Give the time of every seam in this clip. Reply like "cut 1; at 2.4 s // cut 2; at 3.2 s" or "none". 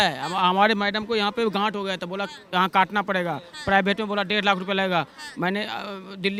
none